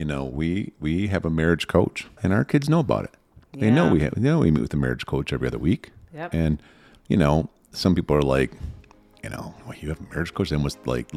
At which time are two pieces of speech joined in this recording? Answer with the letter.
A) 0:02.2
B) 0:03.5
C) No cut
A